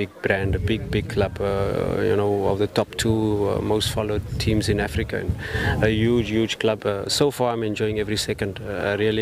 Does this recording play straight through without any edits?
yes; 0 cuts

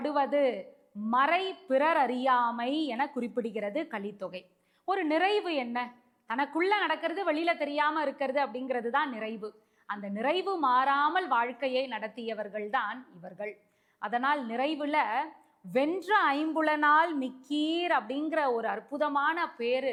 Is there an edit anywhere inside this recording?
no; 0 cuts

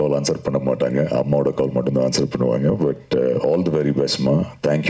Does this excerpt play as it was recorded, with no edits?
yes; 0 cuts

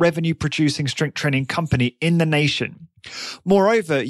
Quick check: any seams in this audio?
no; 0 cuts

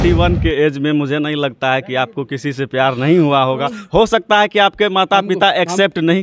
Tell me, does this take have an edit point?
no; 0 cuts

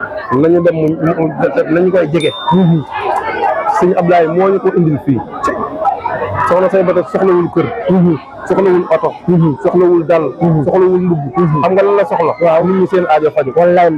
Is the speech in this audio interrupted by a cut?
no; 0 cuts

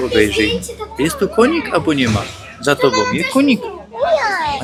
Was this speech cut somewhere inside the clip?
no; 0 cuts

